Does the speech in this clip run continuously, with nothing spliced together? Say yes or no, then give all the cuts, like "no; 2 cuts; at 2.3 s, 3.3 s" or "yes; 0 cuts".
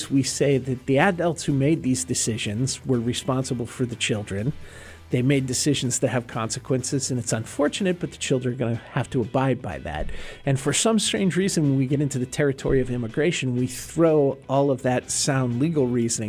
yes; 0 cuts